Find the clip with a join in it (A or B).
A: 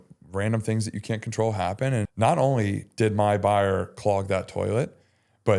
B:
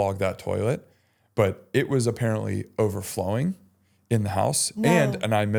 A